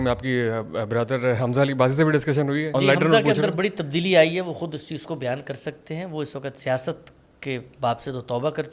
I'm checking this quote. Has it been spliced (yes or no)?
yes